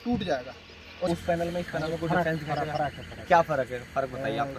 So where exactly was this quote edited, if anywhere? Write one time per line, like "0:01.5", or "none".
0:01.1